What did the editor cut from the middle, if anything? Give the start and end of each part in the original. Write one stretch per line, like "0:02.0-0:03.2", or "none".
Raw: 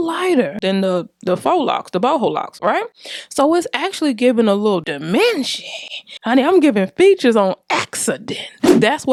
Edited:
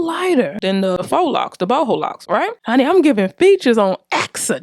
0:01.0-0:01.4
0:02.9-0:06.2